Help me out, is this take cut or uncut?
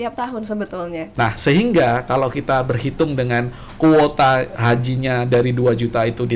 cut